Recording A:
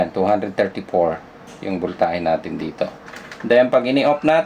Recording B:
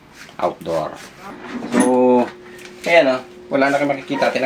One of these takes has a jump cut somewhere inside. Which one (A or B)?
B